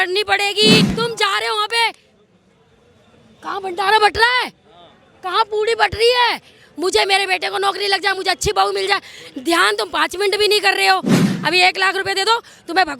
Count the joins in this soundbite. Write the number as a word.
two